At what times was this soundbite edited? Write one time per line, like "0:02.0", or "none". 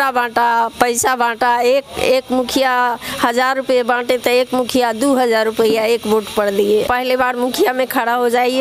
0:06.9